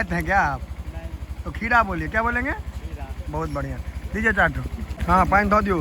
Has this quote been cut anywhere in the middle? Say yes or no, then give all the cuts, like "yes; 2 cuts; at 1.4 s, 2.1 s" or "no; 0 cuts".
yes; 1 cut; at 4.9 s